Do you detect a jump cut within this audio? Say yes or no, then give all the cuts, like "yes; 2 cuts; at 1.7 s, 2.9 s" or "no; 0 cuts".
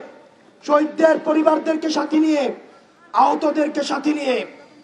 no; 0 cuts